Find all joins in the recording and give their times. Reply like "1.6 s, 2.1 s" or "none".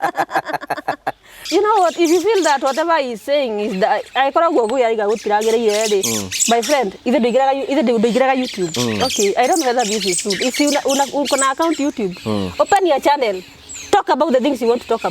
1.3 s